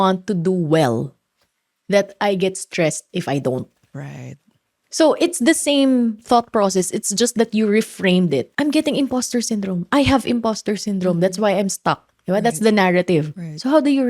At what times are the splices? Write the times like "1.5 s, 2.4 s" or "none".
8.5 s